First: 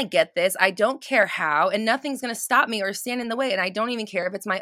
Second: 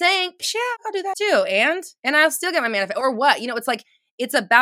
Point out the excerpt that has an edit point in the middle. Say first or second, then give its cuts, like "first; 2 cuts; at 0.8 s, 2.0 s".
second; 1 cut; at 0.9 s